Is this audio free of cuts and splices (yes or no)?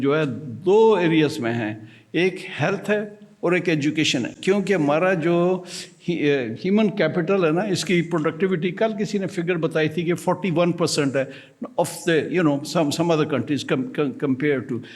yes